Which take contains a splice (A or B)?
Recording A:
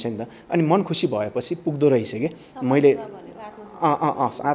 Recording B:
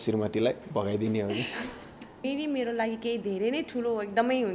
B